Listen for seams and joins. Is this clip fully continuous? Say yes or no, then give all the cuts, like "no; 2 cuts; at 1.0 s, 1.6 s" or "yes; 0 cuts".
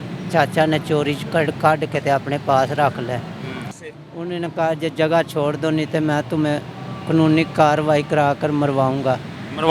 no; 1 cut; at 3.8 s